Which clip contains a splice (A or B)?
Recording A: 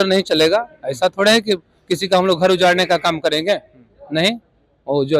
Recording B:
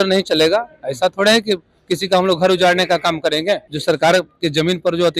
B